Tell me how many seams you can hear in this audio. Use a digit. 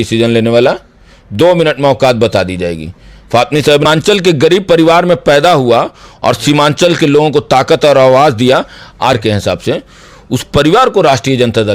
2